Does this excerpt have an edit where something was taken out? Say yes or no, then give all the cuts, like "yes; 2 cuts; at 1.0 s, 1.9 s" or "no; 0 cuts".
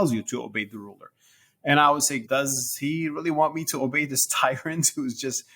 yes; 1 cut; at 2.2 s